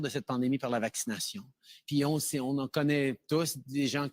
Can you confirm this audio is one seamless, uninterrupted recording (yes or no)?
no